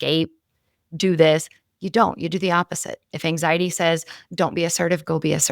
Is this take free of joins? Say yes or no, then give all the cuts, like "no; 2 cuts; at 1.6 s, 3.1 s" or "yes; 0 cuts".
no; 1 cut; at 4.2 s